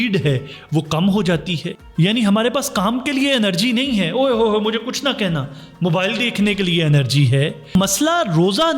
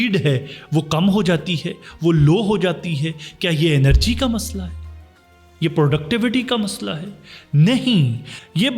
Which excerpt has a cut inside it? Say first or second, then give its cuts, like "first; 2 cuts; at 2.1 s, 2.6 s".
first; 2 cuts; at 1.8 s, 7.8 s